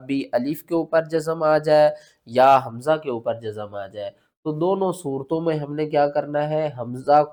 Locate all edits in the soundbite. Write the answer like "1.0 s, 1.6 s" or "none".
none